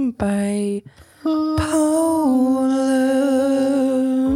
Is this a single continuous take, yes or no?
yes